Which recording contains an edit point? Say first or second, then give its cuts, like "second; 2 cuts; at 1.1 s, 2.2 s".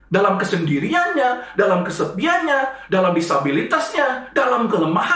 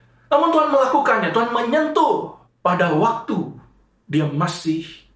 second; 1 cut; at 2.4 s